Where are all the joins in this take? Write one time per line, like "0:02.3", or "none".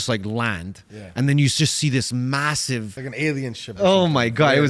0:03.0